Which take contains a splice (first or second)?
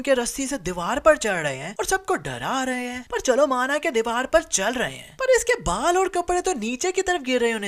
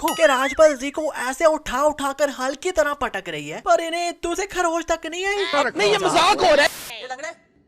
second